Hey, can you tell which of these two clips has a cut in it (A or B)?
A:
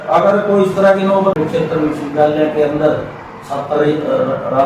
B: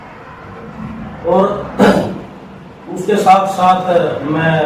A